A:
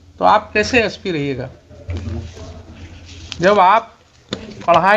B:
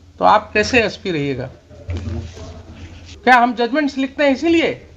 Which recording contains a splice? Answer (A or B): B